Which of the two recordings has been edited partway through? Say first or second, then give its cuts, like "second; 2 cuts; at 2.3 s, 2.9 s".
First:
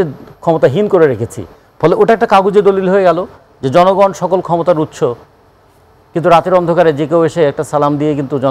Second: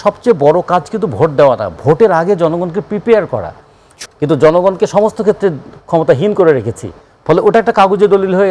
second; 1 cut; at 3.9 s